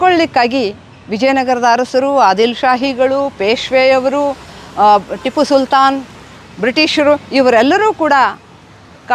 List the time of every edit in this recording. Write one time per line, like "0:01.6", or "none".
none